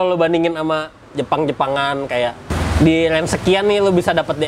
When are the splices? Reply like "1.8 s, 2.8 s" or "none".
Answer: 1.0 s, 2.5 s